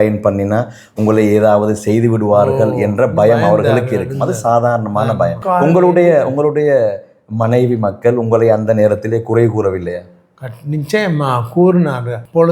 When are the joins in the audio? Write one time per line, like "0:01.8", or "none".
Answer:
0:05.4